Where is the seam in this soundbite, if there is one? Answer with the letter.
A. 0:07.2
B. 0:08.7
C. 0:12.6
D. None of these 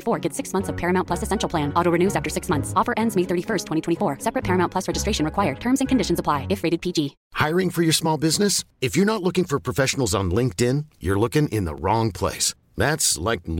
A